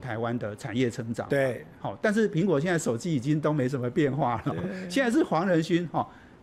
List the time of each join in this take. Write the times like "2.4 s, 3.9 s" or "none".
none